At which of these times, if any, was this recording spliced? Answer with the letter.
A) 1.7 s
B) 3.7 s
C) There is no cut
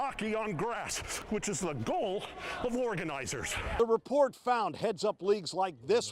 B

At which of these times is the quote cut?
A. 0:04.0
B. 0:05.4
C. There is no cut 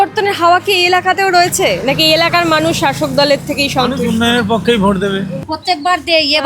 B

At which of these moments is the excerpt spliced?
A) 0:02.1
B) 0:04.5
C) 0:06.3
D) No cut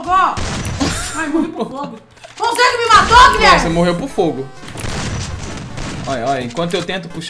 B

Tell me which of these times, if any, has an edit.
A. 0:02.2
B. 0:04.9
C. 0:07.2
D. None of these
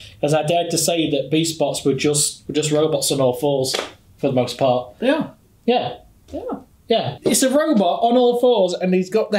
C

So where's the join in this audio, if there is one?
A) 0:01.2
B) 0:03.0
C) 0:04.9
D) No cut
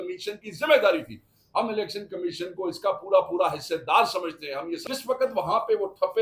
C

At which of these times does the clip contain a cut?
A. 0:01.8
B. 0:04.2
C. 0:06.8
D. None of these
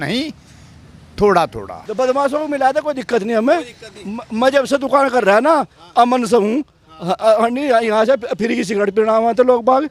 A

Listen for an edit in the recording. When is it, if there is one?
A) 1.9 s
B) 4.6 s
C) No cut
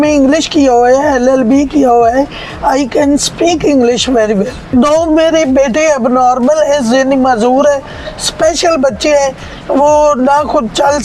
B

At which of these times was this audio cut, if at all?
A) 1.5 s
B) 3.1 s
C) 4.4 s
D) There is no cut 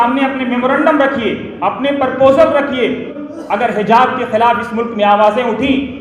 B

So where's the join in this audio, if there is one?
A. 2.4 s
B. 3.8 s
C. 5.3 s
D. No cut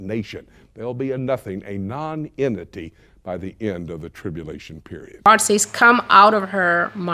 C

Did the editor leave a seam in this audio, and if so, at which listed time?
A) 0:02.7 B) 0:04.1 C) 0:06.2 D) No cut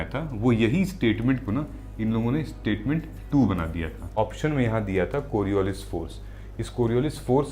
B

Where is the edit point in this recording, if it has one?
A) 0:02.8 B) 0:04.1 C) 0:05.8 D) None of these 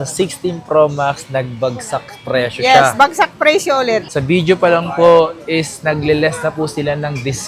B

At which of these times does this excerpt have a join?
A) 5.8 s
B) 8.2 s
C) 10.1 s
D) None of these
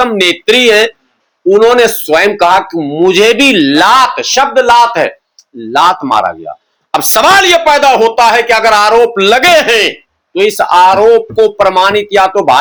D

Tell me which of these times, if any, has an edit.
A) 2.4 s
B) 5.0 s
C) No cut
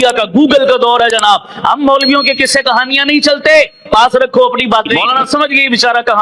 B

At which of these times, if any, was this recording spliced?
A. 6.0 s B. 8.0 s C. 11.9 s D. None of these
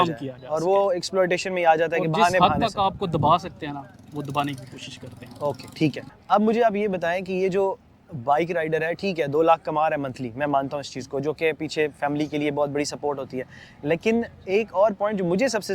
A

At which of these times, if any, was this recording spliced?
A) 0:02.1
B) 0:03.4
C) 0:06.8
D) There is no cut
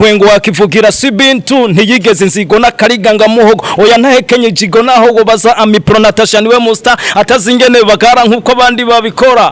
D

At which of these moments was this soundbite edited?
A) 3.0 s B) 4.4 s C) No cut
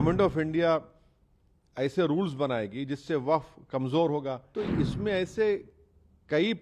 B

